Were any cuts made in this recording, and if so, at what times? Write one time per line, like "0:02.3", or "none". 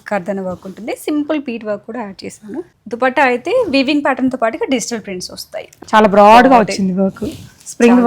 0:02.7
0:05.7